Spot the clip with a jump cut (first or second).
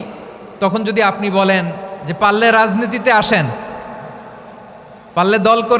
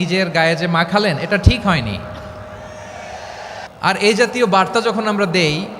second